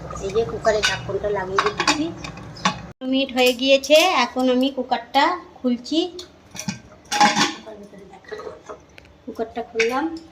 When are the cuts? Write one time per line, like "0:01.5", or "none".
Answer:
0:03.0